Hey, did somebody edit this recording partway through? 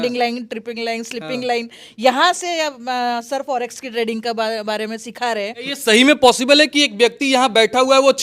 yes; 1 cut; at 5.7 s

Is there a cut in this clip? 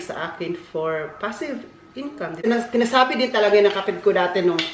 yes; 1 cut; at 2.5 s

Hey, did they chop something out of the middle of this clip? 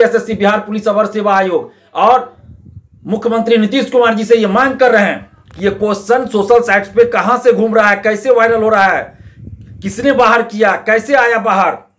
no; 0 cuts

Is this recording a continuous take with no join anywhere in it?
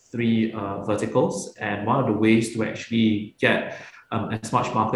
yes; 0 cuts

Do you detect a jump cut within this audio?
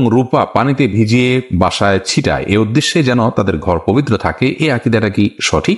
no; 0 cuts

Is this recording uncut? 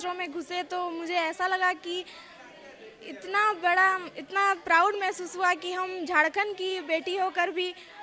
yes; 0 cuts

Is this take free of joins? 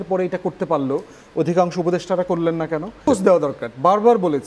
no; 1 cut; at 3.1 s

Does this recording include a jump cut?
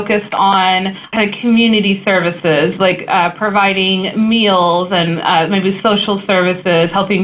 yes; 1 cut; at 1.0 s

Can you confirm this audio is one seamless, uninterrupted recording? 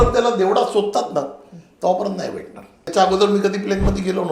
no; 1 cut; at 2.9 s

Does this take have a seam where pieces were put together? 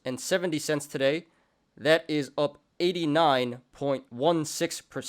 yes; 1 cut; at 4.1 s

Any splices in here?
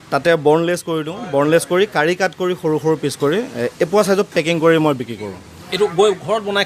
no; 0 cuts

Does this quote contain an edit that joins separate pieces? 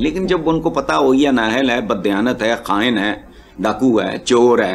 no; 0 cuts

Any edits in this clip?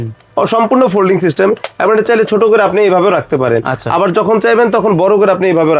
no; 0 cuts

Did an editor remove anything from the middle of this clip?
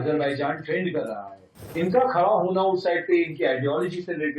yes; 1 cut; at 1.7 s

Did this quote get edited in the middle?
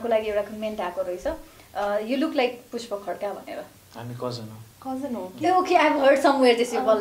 yes; 1 cut; at 3.8 s

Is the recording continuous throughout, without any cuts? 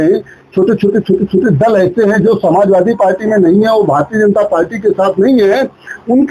yes; 0 cuts

